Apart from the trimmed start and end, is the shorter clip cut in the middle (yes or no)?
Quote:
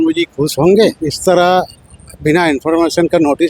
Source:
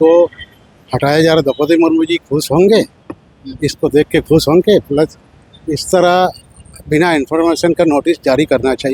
yes